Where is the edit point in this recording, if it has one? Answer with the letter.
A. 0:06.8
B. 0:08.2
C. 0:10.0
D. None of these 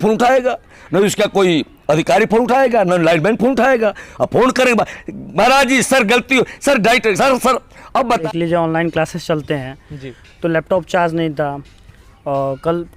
B